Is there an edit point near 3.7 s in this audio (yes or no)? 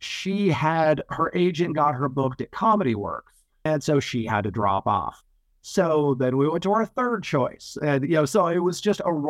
yes